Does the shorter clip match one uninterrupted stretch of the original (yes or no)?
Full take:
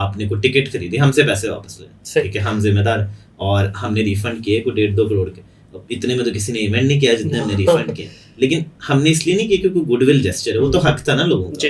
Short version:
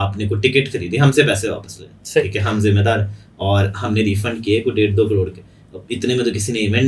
yes